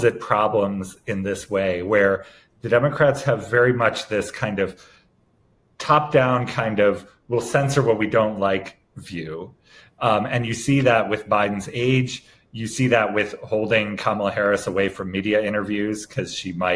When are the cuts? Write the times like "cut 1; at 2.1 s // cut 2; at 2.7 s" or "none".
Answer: none